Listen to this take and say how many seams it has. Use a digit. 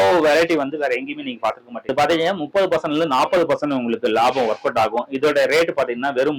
1